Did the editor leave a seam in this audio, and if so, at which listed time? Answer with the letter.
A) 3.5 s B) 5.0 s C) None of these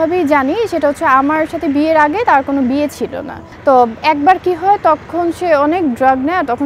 A